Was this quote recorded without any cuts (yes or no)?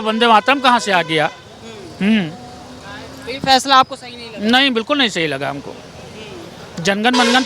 yes